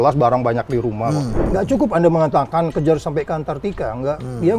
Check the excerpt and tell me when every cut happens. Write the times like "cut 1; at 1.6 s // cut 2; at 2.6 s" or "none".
cut 1; at 1.4 s